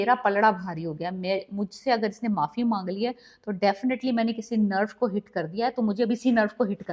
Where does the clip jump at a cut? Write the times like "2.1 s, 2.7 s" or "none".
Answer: none